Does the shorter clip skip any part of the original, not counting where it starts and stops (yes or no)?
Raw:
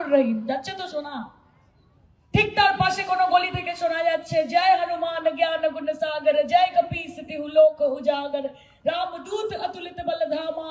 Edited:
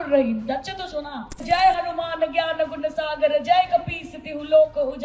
yes